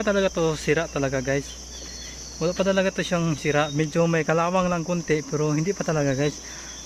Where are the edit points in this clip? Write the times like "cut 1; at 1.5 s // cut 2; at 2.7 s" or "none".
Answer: none